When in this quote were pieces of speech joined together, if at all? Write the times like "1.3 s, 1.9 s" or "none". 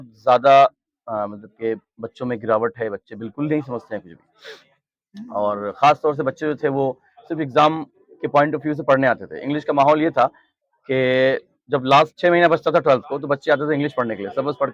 none